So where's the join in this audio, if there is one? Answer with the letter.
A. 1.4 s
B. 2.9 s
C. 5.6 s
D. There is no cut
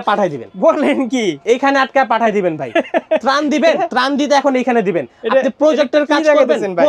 A